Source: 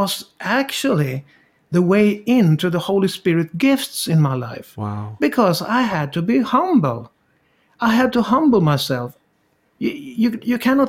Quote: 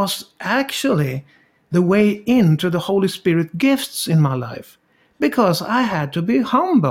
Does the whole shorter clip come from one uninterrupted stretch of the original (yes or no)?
yes